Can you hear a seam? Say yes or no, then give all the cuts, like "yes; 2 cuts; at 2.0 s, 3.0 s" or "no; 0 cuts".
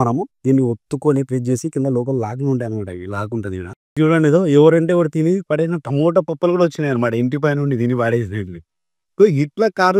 yes; 1 cut; at 4.0 s